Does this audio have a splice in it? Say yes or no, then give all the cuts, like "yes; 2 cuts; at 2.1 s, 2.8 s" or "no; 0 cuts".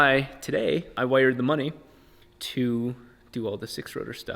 yes; 1 cut; at 1.0 s